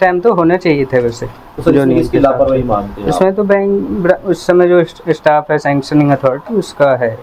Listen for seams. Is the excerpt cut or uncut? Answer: uncut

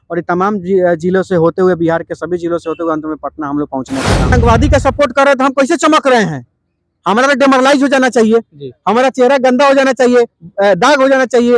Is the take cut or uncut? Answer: cut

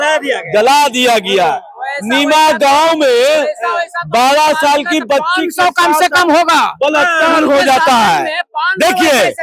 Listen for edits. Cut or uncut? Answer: uncut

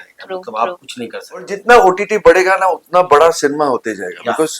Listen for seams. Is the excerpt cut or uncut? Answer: cut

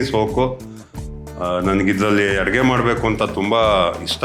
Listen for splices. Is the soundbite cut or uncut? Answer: uncut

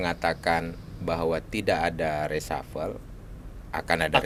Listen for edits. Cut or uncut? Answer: uncut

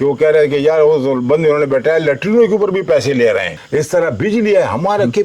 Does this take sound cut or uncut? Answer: cut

